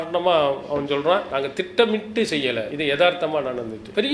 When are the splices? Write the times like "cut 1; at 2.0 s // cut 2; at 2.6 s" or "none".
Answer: cut 1; at 1.3 s // cut 2; at 2.7 s